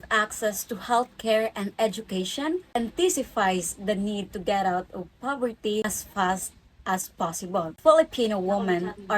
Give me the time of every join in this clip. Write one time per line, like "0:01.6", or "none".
0:02.7
0:05.8
0:07.7